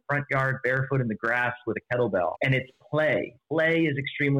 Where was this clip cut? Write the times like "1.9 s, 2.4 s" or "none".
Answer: 2.4 s, 3.4 s